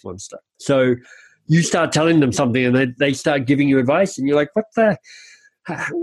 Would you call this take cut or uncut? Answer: cut